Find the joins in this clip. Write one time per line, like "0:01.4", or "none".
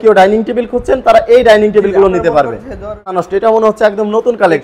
0:03.1